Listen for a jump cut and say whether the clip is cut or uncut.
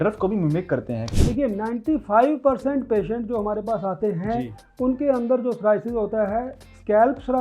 cut